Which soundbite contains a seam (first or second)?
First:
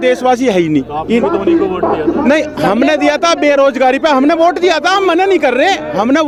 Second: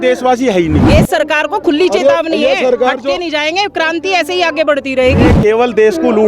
second